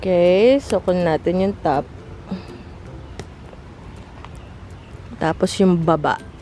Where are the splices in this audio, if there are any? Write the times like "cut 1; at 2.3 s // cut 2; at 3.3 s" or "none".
none